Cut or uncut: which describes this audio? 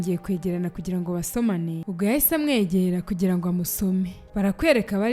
cut